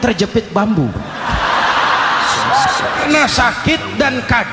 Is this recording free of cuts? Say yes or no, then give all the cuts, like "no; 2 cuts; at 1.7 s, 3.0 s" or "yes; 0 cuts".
no; 1 cut; at 3.1 s